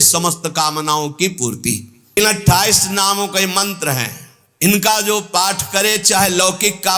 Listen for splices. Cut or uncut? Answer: cut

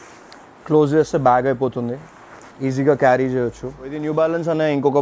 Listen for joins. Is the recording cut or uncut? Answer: cut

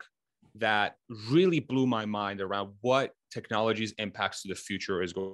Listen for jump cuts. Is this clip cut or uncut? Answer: uncut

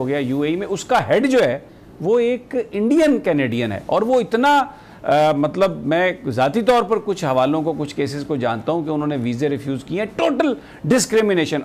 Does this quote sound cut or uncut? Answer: uncut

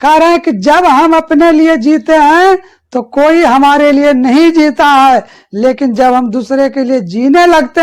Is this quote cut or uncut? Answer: uncut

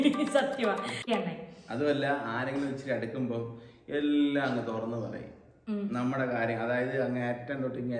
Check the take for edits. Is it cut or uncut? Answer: cut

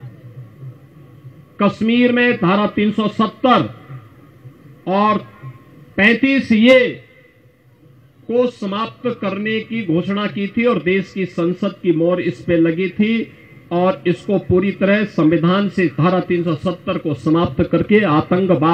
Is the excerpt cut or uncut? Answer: uncut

